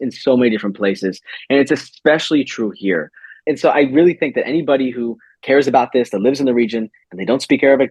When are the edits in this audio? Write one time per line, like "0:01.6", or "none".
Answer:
0:03.4
0:05.3